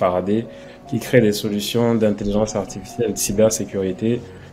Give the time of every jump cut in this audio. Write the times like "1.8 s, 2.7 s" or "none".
none